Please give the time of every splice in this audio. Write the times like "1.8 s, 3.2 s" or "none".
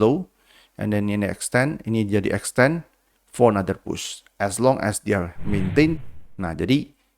6.0 s